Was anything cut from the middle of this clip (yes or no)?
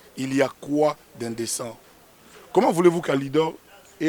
no